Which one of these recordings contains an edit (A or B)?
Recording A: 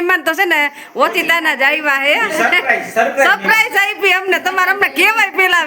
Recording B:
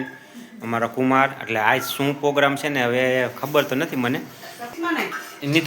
B